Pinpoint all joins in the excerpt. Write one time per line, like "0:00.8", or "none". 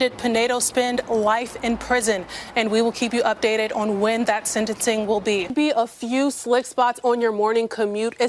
0:05.5